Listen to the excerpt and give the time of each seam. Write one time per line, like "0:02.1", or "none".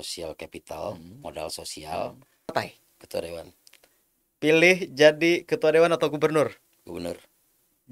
0:02.5